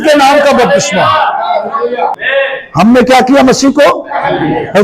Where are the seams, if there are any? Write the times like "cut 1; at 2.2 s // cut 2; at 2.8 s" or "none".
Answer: cut 1; at 2.2 s

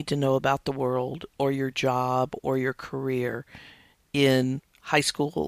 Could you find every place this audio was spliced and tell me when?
none

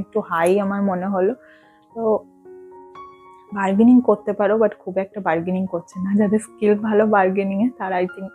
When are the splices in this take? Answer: none

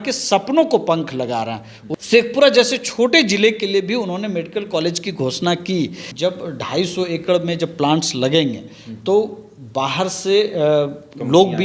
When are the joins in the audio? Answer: cut 1; at 1.8 s // cut 2; at 6.0 s

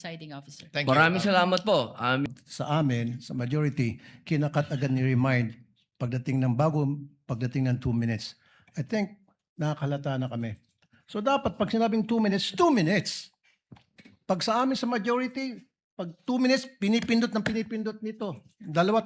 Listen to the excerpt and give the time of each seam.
cut 1; at 2.3 s

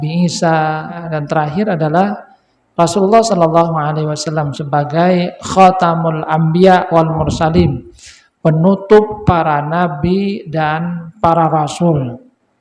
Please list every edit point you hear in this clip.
cut 1; at 1.1 s

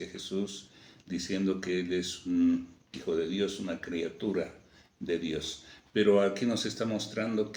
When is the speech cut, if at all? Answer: none

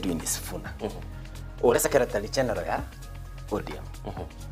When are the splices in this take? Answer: cut 1; at 1.7 s

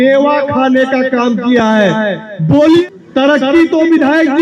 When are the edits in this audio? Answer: cut 1; at 2.9 s

